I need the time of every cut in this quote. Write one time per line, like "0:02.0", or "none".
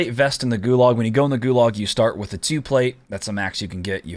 none